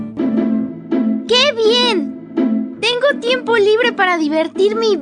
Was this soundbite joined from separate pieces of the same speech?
no; 0 cuts

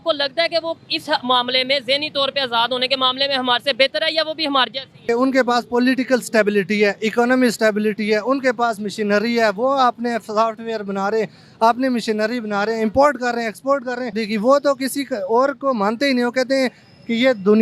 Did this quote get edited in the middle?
yes; 2 cuts; at 5.0 s, 14.2 s

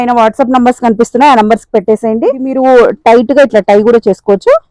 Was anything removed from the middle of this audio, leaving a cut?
yes; 1 cut; at 2.5 s

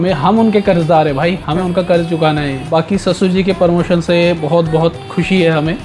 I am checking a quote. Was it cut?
yes; 1 cut; at 2.7 s

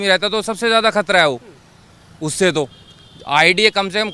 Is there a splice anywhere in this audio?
no; 0 cuts

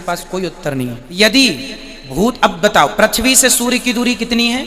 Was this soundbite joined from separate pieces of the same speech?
yes; 1 cut; at 1.0 s

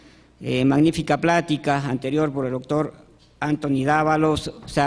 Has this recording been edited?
no; 0 cuts

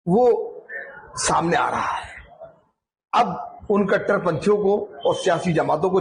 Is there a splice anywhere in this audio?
no; 0 cuts

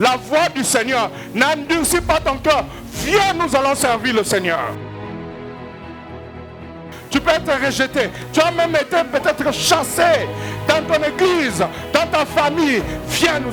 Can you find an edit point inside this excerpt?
no; 0 cuts

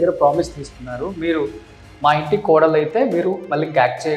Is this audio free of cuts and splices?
yes; 0 cuts

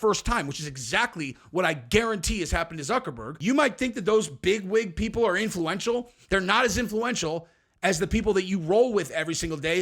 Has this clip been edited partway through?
yes; 1 cut; at 3.2 s

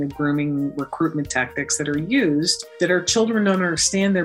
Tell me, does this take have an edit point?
yes; 1 cut; at 2.6 s

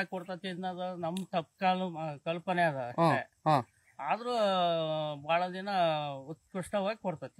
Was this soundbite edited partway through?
no; 0 cuts

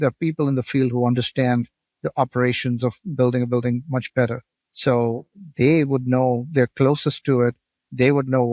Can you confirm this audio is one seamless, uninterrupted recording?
yes; 0 cuts

